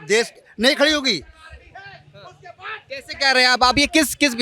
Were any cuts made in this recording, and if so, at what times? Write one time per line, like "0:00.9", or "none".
none